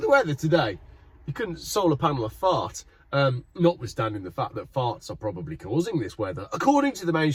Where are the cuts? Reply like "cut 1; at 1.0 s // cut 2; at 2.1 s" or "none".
none